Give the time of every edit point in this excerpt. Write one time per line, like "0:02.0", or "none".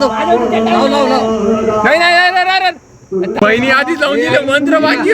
0:03.4